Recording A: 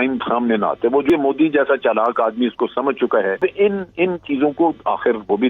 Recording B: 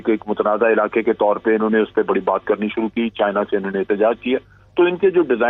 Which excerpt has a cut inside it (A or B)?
A